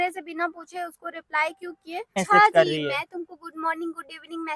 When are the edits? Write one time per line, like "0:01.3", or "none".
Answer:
0:02.2